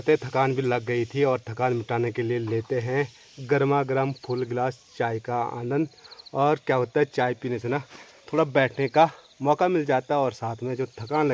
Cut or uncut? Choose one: uncut